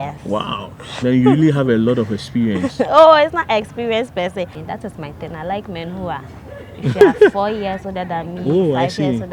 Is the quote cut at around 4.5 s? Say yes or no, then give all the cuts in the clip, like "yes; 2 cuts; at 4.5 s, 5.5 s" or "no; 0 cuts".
yes; 1 cut; at 4.5 s